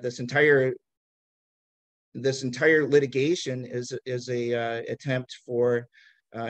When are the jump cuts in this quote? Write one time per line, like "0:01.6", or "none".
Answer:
none